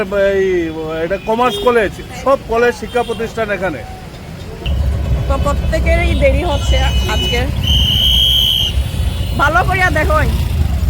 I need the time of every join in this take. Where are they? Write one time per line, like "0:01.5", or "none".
0:04.6